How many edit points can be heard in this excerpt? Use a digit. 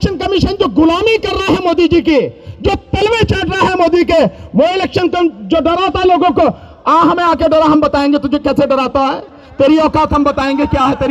0